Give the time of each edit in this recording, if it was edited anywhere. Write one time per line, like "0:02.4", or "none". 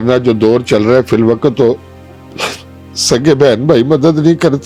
none